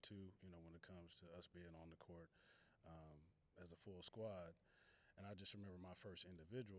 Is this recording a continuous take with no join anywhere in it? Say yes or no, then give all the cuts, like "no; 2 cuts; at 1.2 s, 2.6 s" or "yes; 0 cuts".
yes; 0 cuts